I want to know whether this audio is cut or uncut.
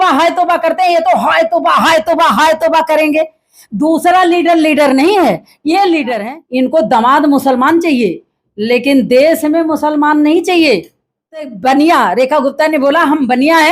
cut